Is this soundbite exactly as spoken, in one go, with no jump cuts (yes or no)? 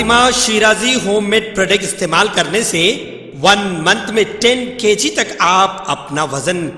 yes